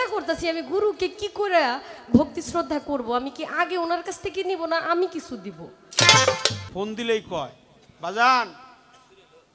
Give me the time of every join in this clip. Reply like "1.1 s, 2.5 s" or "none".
6.6 s